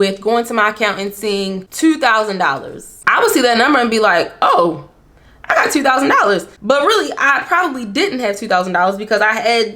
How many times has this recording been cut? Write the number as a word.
two